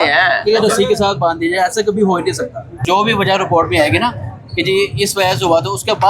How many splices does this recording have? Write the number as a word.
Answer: one